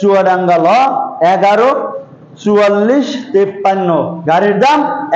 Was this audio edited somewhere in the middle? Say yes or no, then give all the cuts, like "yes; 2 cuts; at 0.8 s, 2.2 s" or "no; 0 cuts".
no; 0 cuts